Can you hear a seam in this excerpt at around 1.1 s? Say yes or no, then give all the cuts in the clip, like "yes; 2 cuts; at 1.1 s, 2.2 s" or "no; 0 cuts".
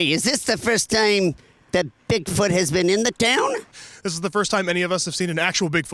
no; 1 cut; at 3.8 s